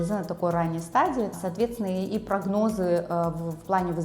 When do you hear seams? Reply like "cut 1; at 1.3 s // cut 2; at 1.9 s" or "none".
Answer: cut 1; at 1.4 s